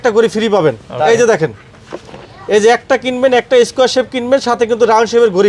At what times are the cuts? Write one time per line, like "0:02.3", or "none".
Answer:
none